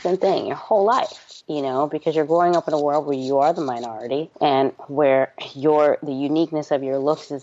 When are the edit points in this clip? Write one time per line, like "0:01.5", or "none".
none